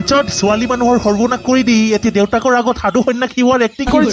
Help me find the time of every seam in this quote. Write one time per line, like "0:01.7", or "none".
none

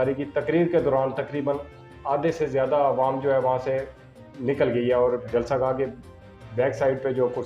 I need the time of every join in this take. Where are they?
none

